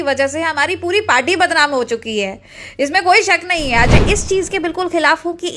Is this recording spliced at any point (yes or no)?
yes